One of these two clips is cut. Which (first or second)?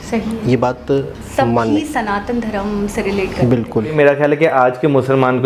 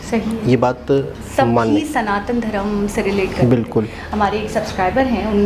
first